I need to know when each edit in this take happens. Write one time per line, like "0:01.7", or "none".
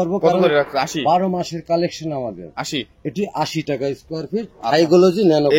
none